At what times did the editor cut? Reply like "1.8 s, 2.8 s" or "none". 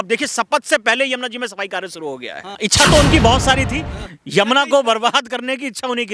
2.6 s